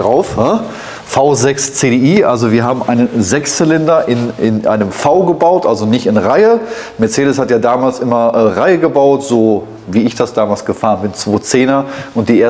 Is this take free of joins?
yes; 0 cuts

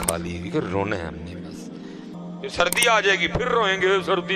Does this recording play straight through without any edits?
no; 1 cut; at 2.1 s

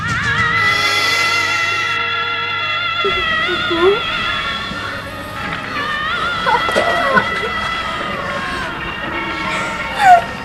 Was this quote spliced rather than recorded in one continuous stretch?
no; 0 cuts

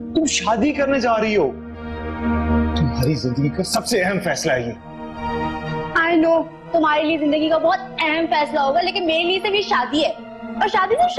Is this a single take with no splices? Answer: yes; 0 cuts

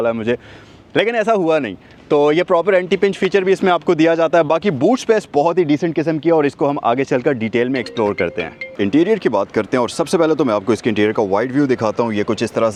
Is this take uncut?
yes; 0 cuts

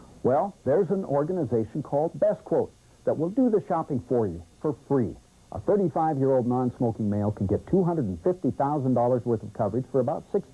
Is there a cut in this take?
no; 0 cuts

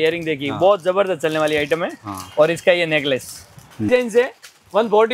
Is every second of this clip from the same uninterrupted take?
no; 1 cut; at 3.9 s

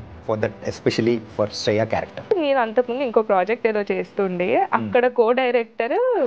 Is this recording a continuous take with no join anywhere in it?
no; 1 cut; at 2.3 s

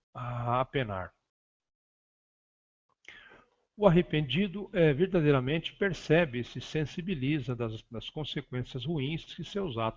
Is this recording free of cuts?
no; 1 cut; at 8.7 s

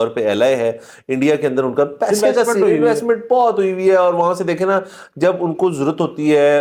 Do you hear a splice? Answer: no; 0 cuts

